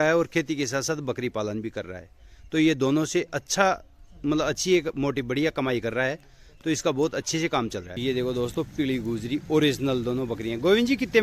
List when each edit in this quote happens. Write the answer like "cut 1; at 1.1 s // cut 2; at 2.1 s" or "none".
cut 1; at 7.9 s